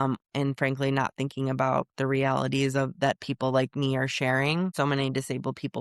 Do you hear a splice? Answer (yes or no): yes